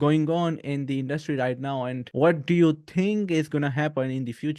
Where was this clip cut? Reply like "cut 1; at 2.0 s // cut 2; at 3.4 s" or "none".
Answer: none